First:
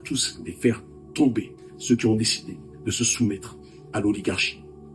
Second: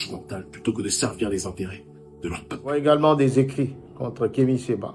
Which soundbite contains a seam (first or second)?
second